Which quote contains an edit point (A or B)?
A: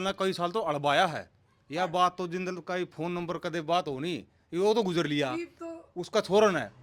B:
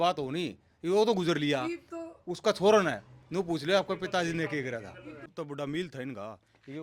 B